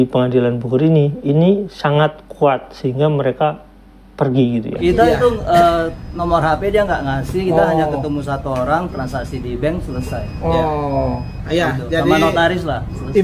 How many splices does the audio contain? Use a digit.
1